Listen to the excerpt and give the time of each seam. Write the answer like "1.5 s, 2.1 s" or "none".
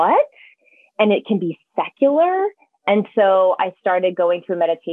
none

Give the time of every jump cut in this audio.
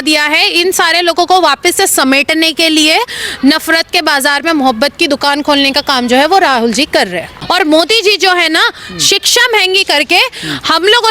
7.3 s

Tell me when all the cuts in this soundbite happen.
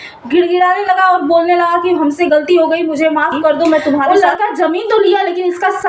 4.0 s

